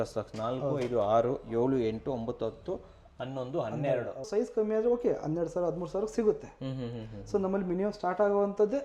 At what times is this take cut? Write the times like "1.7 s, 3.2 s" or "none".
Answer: 4.3 s